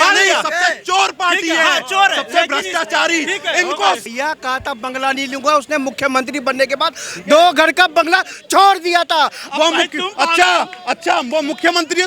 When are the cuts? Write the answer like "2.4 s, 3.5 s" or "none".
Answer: 4.0 s, 9.4 s